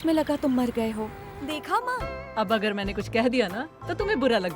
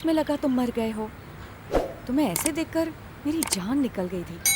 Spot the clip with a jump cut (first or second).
first